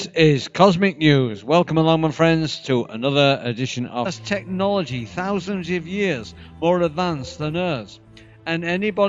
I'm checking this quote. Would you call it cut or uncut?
uncut